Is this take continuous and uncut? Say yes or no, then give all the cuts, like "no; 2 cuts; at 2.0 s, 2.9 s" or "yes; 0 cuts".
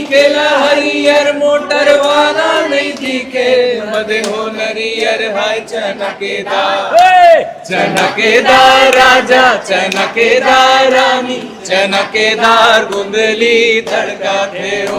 yes; 0 cuts